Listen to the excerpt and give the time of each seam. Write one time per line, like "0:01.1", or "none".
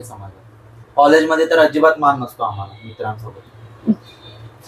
none